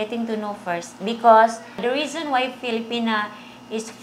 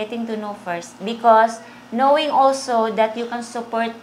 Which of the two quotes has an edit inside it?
first; 1 cut; at 1.8 s

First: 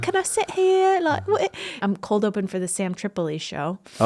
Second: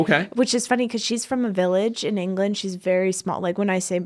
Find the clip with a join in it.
first; 1 cut; at 1.8 s

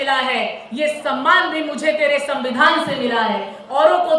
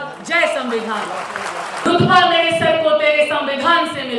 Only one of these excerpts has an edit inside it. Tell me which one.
second; 1 cut; at 1.9 s

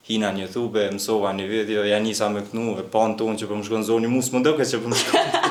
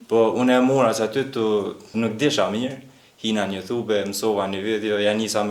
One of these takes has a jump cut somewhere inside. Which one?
second; 1 cut; at 1.9 s

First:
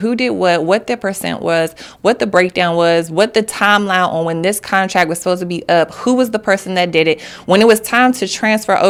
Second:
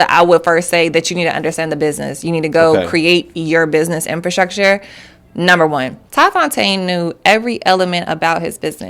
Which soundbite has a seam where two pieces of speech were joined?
second; 1 cut; at 6.0 s

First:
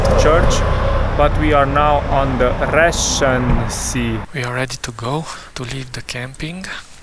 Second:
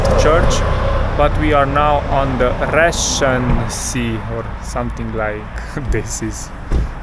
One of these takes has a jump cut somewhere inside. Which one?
first; 2 cuts; at 4.2 s, 5.4 s

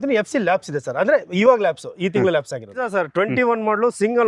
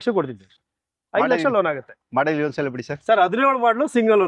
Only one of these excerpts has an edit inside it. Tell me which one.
first; 1 cut; at 2.8 s

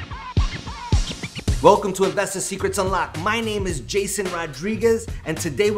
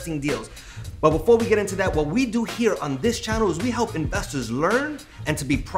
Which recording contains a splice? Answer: first; 1 cut; at 1.2 s

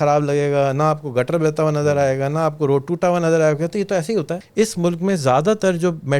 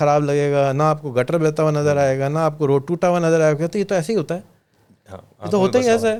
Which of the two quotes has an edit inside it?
first; 1 cut; at 4.4 s

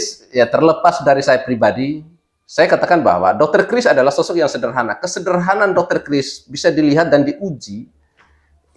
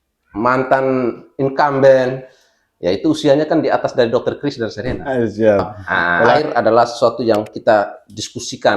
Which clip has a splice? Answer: second; 1 cut; at 6.4 s

